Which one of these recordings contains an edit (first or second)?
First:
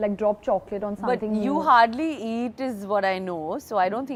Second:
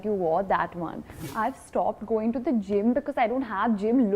second